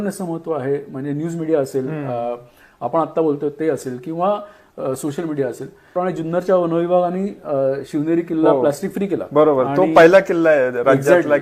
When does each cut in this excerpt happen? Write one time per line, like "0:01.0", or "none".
0:06.0